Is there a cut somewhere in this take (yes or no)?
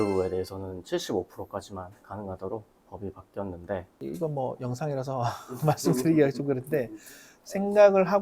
yes